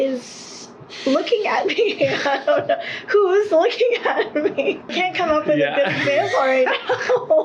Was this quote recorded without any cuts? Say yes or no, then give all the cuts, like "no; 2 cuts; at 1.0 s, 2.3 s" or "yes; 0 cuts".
no; 1 cut; at 4.9 s